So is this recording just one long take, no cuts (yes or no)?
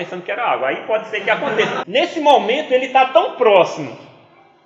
no